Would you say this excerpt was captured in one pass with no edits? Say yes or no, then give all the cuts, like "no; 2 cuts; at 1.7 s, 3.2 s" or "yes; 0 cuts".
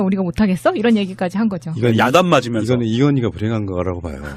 yes; 0 cuts